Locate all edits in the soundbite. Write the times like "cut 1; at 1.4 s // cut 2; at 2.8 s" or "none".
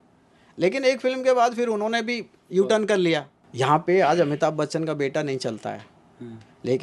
cut 1; at 3.4 s

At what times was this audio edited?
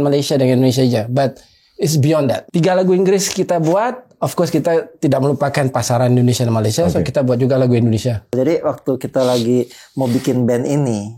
cut 1; at 2.4 s // cut 2; at 8.3 s

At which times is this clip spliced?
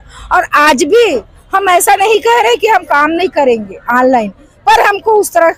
none

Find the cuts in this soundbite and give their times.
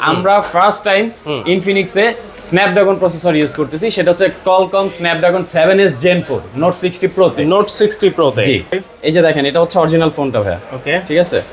cut 1; at 8.8 s

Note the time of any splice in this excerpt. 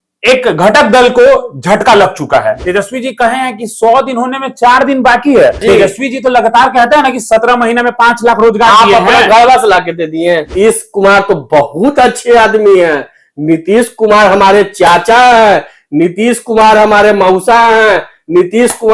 cut 1; at 2.6 s // cut 2; at 5.6 s // cut 3; at 10.5 s

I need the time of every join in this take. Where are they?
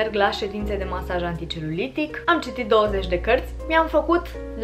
cut 1; at 2.2 s // cut 2; at 3.6 s

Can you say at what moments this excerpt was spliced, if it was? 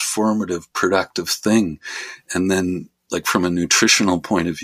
none

